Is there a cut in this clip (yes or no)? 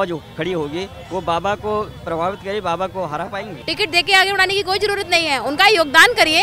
yes